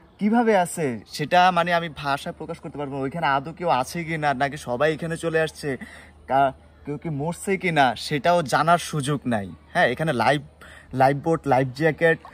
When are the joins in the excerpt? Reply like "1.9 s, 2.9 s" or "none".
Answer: none